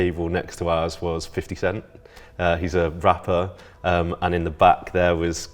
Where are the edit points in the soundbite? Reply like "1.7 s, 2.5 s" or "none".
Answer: none